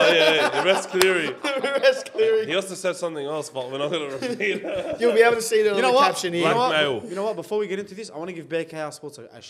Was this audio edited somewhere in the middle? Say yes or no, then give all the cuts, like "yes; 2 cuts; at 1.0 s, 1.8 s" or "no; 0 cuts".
no; 0 cuts